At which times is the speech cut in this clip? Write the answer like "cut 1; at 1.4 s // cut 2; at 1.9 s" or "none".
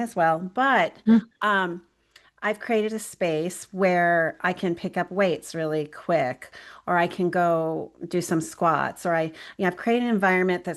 none